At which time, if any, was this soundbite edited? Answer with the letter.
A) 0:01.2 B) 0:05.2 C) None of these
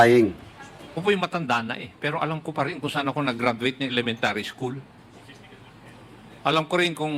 A